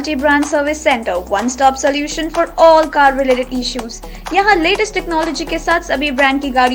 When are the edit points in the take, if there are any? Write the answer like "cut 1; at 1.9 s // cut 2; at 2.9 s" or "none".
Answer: none